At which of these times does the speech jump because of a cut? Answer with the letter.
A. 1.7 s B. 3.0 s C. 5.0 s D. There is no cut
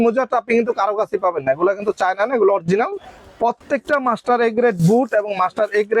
B